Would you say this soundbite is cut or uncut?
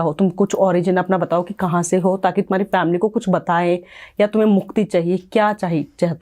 uncut